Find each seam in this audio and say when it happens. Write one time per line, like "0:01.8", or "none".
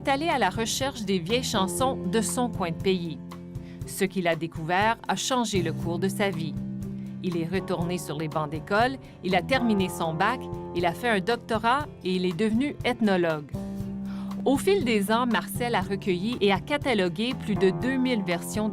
0:11.7